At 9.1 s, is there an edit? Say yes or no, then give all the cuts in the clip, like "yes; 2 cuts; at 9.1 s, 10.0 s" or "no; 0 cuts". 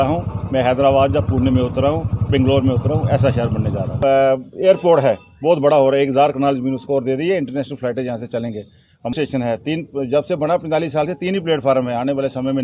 yes; 2 cuts; at 4.0 s, 9.1 s